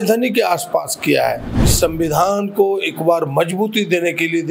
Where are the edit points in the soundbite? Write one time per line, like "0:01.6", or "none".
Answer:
0:01.7